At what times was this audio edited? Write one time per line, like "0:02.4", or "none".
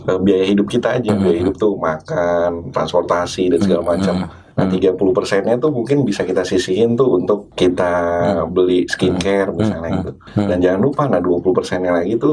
0:04.4
0:07.5
0:10.2